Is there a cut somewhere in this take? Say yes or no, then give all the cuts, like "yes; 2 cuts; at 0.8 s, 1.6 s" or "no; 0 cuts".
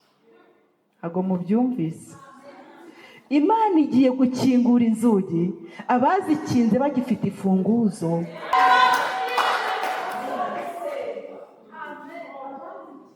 no; 0 cuts